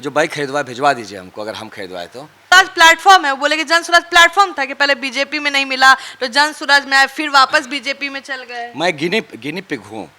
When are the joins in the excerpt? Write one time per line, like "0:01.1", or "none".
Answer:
0:02.5